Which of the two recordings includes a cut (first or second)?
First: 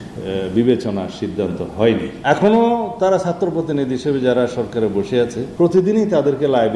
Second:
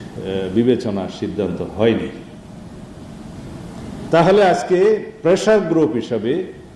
first